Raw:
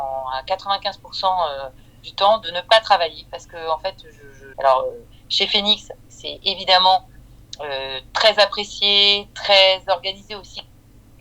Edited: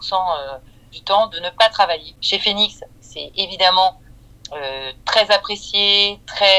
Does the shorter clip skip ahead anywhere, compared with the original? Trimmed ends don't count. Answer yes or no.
yes